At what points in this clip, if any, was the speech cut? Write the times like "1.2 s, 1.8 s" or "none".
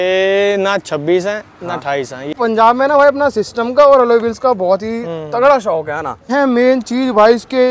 2.3 s, 6.3 s